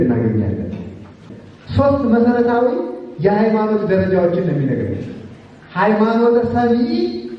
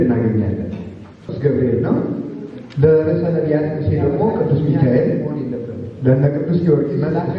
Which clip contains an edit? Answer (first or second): first